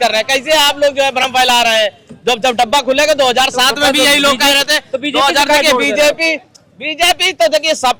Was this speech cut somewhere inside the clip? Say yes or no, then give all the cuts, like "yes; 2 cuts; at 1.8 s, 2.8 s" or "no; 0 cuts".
no; 0 cuts